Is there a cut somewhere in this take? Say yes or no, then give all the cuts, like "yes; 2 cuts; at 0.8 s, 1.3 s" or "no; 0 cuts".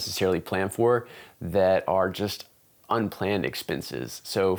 no; 0 cuts